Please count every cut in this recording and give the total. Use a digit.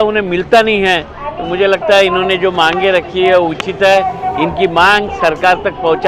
0